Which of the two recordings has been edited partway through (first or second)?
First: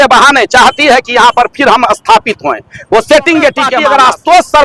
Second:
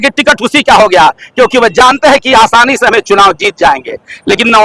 first